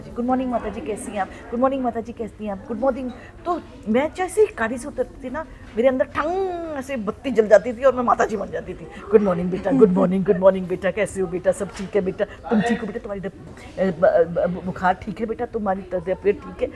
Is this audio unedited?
yes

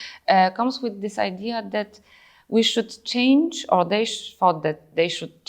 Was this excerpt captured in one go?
yes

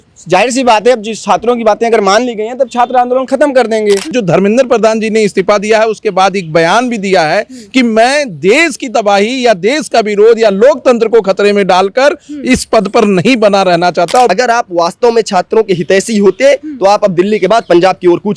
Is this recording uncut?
no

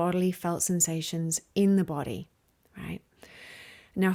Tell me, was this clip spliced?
no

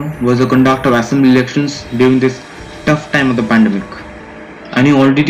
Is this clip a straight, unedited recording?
yes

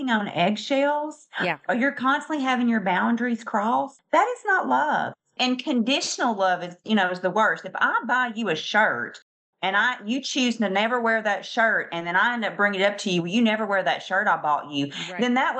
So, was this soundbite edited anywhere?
no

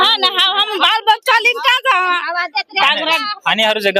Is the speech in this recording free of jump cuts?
yes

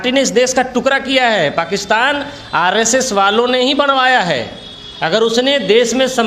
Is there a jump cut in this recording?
no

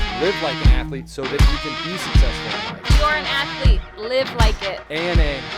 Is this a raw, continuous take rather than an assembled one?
no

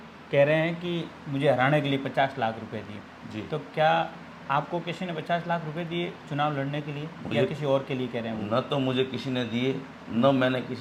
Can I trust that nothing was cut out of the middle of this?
yes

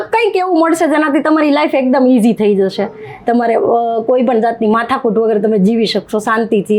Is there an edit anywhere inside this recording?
no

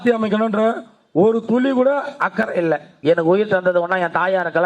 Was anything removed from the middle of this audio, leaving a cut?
yes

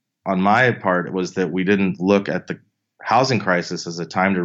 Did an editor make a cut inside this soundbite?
yes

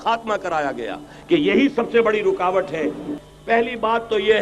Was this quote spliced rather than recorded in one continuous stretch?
yes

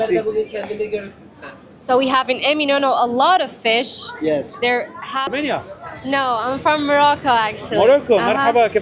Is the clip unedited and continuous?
no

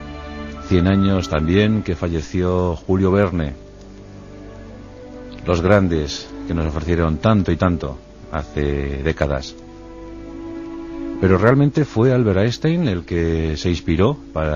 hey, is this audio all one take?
no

